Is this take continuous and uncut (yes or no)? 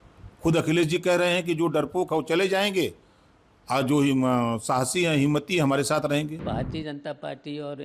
no